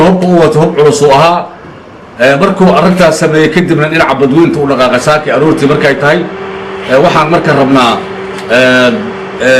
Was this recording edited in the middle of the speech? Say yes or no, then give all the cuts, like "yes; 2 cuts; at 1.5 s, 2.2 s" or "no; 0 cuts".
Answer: yes; 1 cut; at 7.7 s